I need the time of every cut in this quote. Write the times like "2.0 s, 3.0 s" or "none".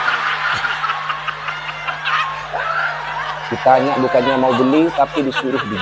none